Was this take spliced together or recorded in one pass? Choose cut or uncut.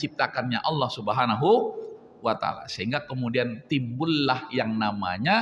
uncut